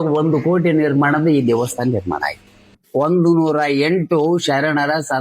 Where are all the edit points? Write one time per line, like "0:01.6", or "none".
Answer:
0:02.8